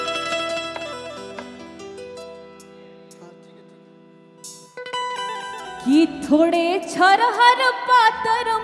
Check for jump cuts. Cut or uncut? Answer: uncut